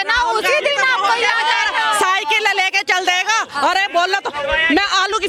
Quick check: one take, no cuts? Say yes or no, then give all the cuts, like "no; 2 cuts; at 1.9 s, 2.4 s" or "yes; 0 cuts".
yes; 0 cuts